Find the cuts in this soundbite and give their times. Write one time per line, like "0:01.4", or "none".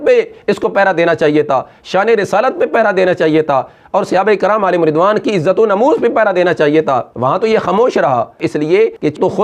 none